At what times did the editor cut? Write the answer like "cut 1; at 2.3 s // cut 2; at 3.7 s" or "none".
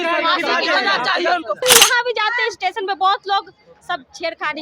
cut 1; at 1.6 s